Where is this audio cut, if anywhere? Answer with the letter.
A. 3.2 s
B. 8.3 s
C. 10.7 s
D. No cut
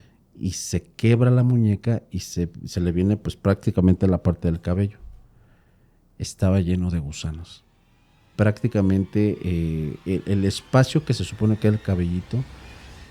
B